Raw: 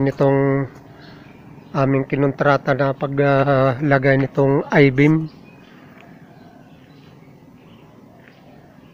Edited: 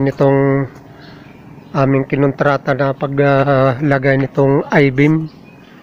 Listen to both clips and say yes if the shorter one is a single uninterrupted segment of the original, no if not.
yes